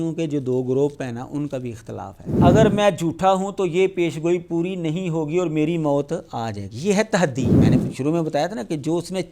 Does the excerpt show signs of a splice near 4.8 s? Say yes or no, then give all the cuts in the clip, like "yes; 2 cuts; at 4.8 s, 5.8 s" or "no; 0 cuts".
no; 2 cuts; at 2.4 s, 7.6 s